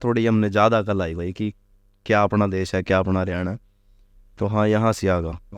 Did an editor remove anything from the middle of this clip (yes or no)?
no